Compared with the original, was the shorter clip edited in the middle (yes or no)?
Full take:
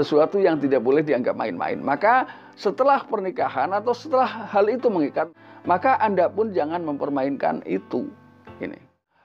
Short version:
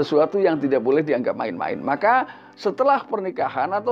no